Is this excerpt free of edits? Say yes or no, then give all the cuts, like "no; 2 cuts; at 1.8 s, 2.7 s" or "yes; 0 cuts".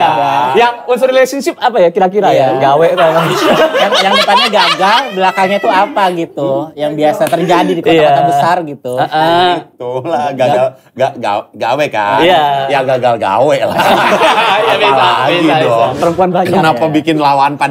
no; 1 cut; at 15.9 s